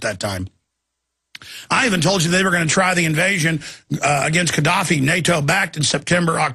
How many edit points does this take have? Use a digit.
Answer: 0